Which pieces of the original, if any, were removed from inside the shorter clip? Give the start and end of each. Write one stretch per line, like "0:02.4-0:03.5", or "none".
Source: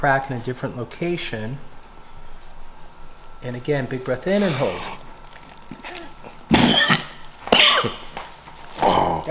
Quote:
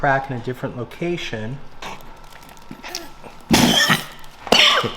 0:01.8-0:04.8